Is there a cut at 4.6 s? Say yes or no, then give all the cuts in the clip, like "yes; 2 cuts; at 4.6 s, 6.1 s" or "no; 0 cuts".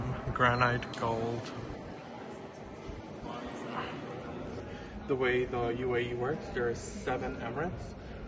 yes; 1 cut; at 4.6 s